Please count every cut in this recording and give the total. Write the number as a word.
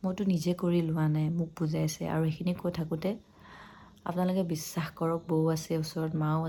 zero